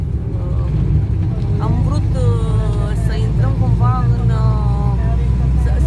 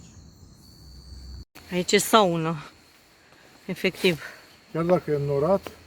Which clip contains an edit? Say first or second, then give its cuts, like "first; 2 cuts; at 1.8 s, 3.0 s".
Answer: second; 1 cut; at 1.5 s